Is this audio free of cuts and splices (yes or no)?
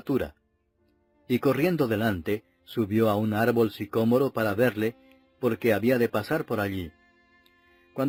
yes